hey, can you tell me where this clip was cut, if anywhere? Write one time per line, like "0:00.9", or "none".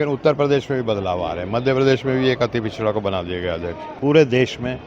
0:03.9